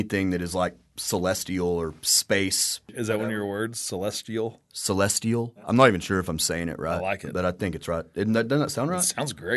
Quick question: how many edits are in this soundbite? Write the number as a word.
zero